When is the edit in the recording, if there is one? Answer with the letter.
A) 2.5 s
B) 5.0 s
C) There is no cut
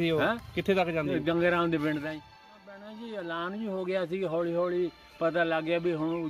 A